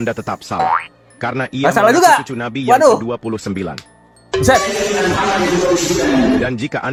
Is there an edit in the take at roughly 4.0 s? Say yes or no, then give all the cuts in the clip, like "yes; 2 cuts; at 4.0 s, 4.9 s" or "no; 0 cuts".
no; 0 cuts